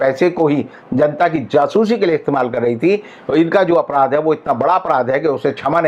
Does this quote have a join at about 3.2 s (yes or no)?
no